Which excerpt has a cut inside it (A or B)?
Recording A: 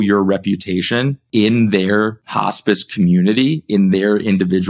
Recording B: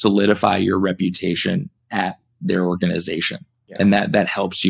A